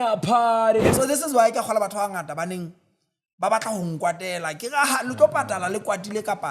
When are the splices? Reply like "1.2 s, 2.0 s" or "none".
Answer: 0.9 s